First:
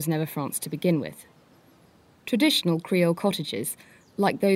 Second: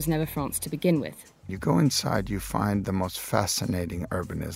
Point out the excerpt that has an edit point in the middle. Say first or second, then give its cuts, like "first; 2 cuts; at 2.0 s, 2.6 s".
second; 1 cut; at 1.6 s